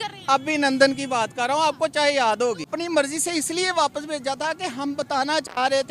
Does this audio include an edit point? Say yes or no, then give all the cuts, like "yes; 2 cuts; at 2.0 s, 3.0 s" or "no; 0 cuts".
yes; 1 cut; at 2.7 s